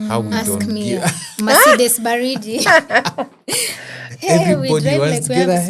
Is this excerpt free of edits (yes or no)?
yes